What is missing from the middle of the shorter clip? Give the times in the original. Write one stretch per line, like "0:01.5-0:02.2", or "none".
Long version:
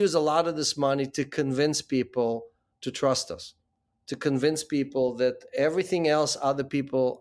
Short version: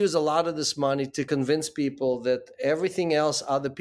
0:01.3-0:04.2